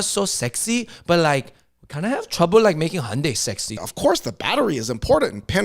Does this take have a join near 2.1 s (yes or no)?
no